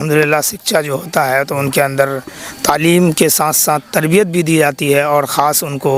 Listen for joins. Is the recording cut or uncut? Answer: uncut